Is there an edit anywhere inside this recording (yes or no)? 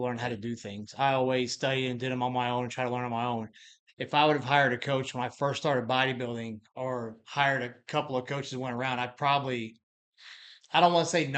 no